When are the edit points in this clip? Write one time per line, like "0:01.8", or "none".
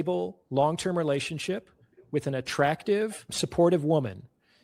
0:03.3